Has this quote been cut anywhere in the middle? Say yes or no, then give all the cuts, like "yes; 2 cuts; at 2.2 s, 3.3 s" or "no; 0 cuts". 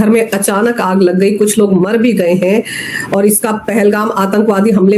no; 0 cuts